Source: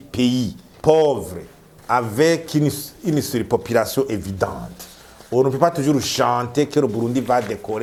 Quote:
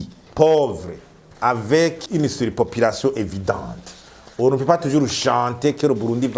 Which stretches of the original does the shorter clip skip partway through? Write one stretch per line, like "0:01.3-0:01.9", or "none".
0:02.5-0:02.9